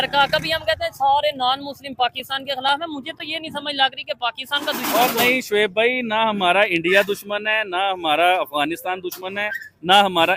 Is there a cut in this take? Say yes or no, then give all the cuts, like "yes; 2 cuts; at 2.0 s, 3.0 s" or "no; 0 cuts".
no; 0 cuts